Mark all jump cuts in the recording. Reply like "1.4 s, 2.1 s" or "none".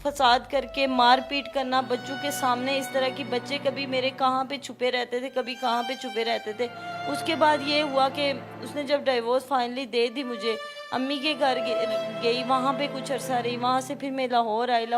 6.9 s